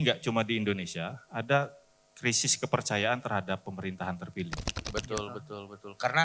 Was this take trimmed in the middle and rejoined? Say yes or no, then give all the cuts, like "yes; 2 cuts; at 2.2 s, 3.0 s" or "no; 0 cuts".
yes; 1 cut; at 4.8 s